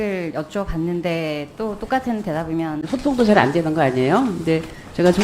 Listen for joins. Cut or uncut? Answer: cut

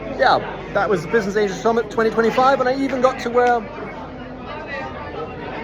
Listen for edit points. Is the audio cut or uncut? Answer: uncut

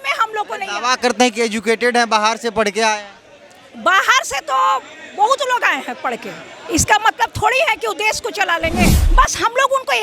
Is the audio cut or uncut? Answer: cut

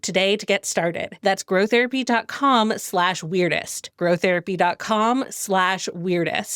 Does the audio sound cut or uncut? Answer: uncut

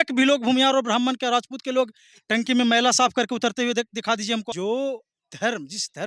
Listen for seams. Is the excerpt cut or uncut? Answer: cut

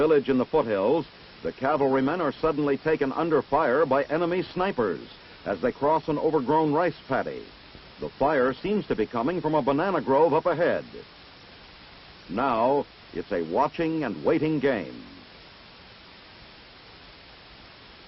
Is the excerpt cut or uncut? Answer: uncut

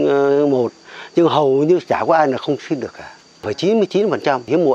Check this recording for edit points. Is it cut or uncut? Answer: cut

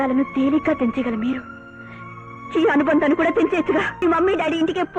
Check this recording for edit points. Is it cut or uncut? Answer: cut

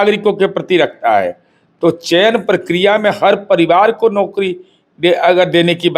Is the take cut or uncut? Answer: uncut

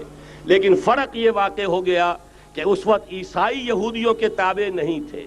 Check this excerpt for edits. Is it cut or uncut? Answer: uncut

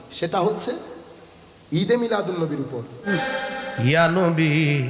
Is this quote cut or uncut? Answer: cut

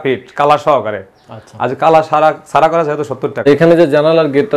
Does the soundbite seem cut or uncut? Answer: cut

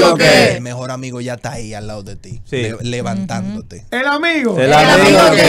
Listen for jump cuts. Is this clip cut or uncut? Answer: cut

